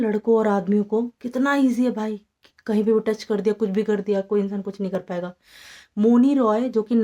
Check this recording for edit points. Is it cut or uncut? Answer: uncut